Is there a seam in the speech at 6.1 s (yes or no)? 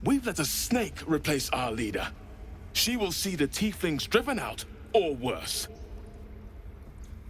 yes